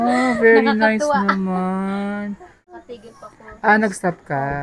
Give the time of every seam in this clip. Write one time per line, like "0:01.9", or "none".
0:02.8

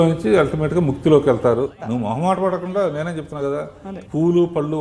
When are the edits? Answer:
0:01.8

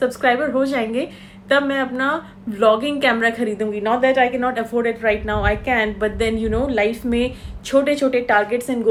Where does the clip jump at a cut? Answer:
none

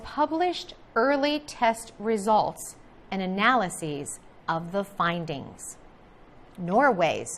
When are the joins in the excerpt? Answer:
0:03.6

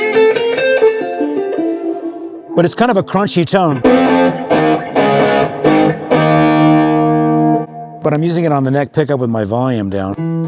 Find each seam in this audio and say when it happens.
0:02.4
0:07.7

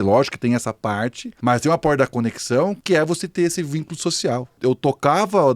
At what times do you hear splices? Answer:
0:01.2
0:02.8
0:04.6

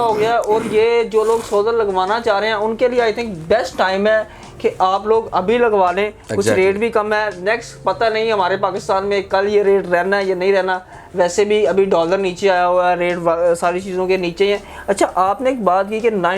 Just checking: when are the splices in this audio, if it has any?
none

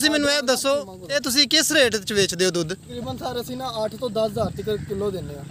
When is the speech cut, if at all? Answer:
0:01.0
0:02.9

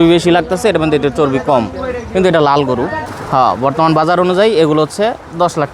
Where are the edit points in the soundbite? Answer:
0:03.1

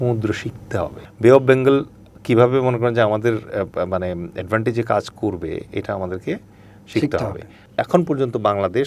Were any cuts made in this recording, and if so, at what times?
0:01.0
0:07.6

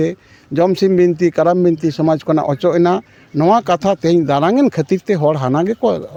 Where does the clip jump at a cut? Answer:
none

